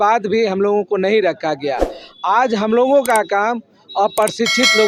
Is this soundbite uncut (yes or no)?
yes